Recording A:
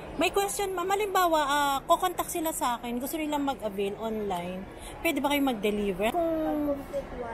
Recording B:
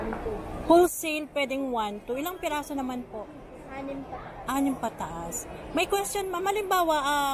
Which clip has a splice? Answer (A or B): A